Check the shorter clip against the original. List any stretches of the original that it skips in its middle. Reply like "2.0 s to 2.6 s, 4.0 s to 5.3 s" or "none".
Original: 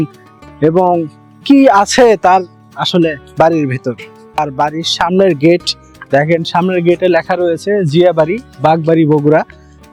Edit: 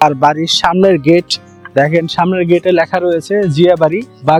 none